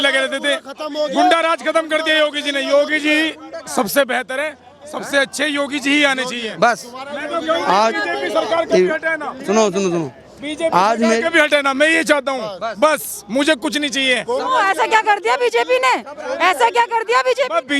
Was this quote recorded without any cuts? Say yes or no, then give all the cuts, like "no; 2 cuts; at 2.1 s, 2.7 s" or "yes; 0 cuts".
yes; 0 cuts